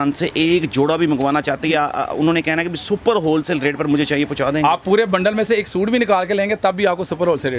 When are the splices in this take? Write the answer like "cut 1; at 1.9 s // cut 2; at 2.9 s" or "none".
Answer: none